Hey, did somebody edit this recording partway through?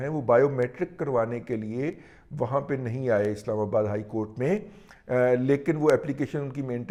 no; 0 cuts

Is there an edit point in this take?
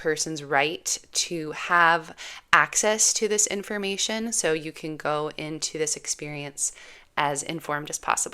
no; 0 cuts

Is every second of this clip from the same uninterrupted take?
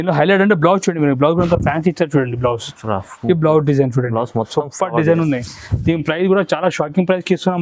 yes; 0 cuts

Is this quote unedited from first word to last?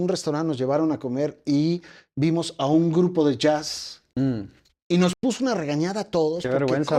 yes; 0 cuts

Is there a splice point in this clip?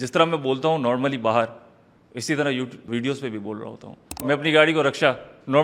yes; 2 cuts; at 2.9 s, 4.3 s

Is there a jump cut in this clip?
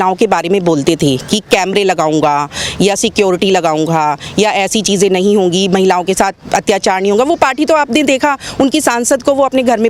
no; 0 cuts

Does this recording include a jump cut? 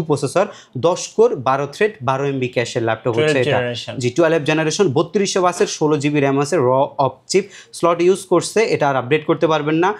no; 0 cuts

